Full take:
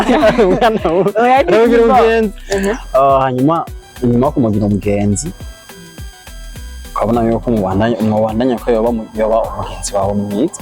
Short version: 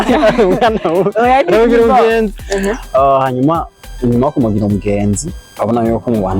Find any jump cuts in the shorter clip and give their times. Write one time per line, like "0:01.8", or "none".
0:05.4